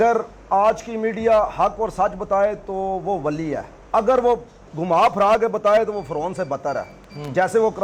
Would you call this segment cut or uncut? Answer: uncut